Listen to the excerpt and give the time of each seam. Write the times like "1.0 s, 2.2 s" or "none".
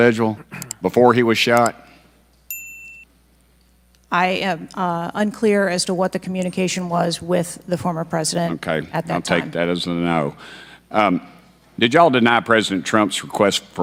none